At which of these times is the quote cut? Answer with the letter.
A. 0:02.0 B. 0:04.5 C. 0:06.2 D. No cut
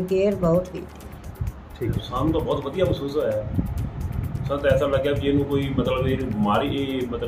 A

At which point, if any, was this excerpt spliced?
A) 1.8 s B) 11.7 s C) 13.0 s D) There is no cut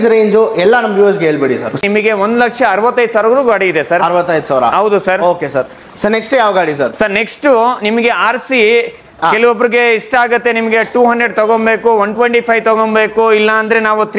A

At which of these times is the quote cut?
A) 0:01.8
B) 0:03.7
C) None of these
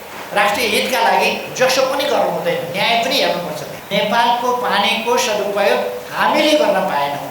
B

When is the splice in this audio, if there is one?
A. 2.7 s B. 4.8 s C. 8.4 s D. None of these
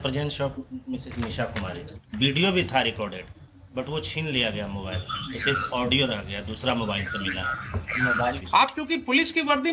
C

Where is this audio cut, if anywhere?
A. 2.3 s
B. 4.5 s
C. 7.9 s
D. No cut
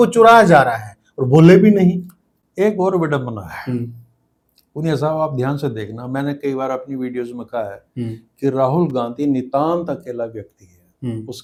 D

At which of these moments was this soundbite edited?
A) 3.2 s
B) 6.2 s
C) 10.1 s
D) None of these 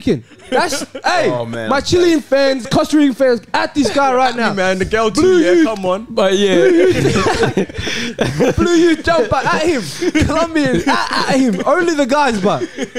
C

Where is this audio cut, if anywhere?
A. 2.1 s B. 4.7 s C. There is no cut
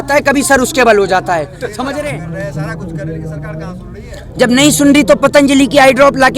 A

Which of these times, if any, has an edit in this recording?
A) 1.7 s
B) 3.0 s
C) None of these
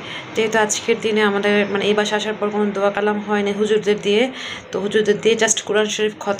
C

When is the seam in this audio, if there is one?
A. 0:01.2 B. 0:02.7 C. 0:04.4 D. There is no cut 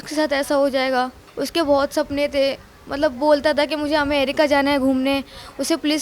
A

